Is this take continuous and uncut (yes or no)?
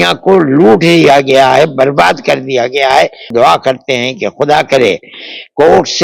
no